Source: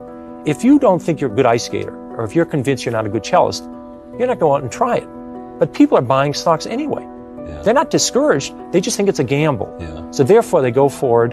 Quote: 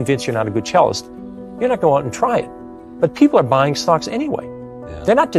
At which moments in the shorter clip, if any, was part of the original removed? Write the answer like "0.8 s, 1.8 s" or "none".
none